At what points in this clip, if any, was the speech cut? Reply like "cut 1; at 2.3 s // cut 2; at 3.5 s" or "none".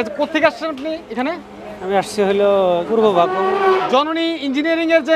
cut 1; at 2.9 s // cut 2; at 3.8 s